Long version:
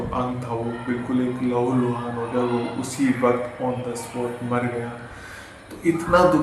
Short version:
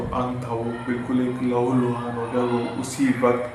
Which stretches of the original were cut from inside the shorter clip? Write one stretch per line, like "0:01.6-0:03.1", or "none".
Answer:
none